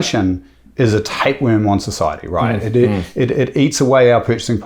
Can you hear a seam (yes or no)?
no